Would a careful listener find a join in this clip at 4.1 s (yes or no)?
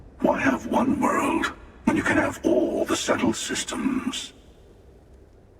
yes